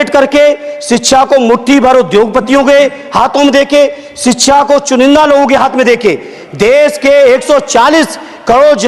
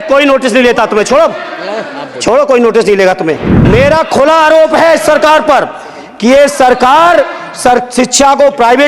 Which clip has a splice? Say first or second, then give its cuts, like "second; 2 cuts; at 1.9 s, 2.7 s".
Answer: second; 1 cut; at 3.5 s